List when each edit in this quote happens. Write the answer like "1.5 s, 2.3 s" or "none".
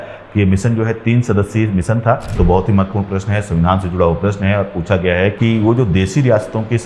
2.3 s, 5.3 s